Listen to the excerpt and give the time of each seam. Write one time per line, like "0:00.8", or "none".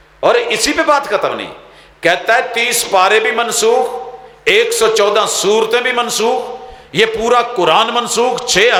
none